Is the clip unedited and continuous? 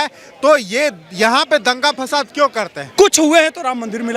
no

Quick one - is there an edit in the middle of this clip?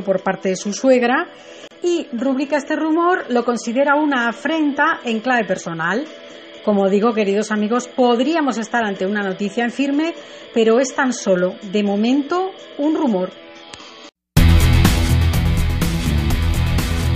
no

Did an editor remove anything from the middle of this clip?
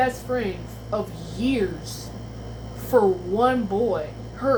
no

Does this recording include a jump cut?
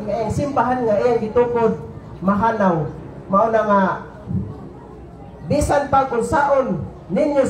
no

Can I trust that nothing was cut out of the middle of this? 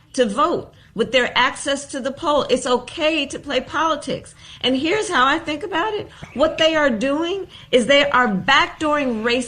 no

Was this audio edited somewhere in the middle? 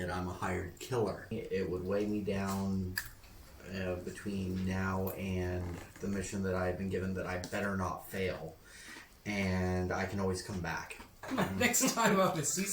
yes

